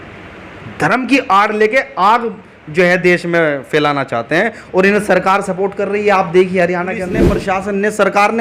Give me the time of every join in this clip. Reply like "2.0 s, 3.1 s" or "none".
7.3 s